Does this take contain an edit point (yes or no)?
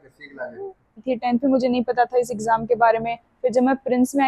yes